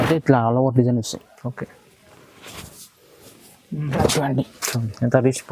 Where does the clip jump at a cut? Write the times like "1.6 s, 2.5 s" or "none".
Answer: 4.0 s